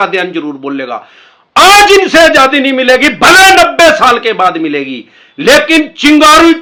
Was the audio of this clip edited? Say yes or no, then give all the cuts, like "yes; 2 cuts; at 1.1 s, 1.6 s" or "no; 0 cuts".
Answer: no; 0 cuts